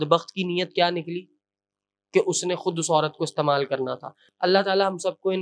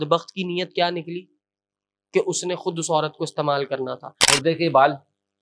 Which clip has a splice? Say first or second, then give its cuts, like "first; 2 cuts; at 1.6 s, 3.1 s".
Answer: second; 1 cut; at 4.2 s